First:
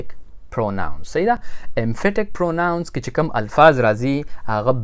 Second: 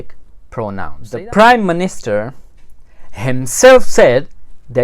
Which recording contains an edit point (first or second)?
second